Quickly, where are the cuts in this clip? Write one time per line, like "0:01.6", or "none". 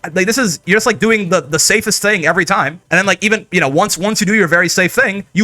0:02.8